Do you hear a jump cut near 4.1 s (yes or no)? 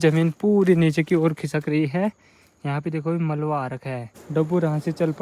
yes